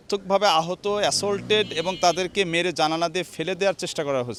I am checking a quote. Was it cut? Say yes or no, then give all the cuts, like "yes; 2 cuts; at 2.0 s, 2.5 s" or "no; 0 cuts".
no; 0 cuts